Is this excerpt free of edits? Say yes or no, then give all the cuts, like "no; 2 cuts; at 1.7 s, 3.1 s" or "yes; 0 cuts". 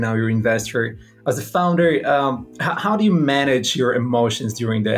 yes; 0 cuts